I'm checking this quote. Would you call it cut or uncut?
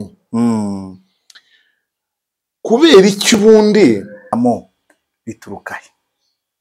cut